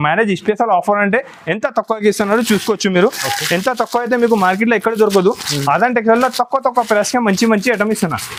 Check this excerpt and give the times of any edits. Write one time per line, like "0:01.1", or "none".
none